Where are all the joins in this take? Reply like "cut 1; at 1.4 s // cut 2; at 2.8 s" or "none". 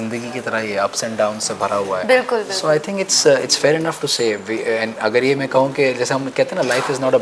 none